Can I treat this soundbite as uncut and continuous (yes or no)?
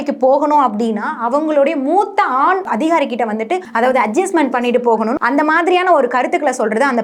no